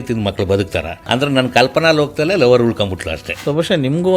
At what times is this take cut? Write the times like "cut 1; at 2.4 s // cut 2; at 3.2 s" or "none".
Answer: cut 1; at 1.1 s // cut 2; at 3.3 s